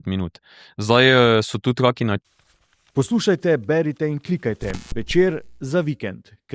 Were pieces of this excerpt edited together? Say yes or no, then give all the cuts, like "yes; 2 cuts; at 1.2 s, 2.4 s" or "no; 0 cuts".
yes; 1 cut; at 2.2 s